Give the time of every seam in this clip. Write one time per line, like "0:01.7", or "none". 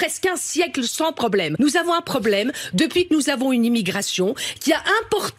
0:01.5